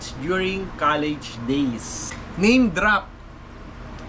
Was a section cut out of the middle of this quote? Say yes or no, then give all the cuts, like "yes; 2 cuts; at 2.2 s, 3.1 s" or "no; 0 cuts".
yes; 1 cut; at 2.4 s